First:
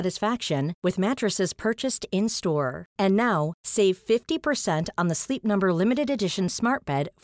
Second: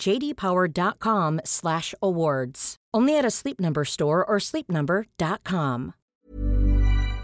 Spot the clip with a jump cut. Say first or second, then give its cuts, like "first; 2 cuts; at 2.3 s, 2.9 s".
second; 1 cut; at 6.1 s